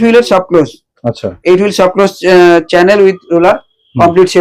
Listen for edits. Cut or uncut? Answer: uncut